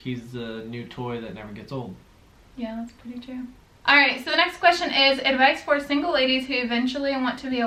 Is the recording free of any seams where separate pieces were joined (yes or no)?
yes